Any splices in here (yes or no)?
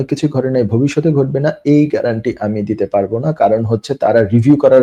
no